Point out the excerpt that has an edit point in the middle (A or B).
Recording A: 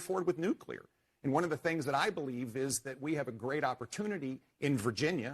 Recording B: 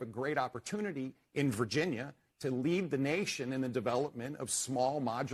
A